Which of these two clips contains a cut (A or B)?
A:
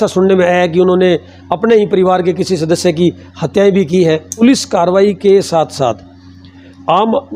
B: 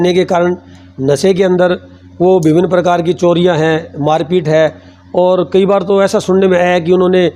A